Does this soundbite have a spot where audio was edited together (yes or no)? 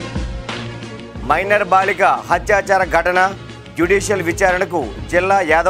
no